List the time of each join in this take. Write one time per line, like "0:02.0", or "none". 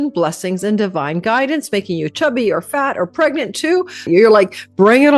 0:04.0